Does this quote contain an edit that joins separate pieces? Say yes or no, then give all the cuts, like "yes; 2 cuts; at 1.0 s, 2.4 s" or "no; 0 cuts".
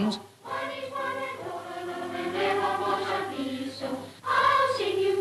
no; 0 cuts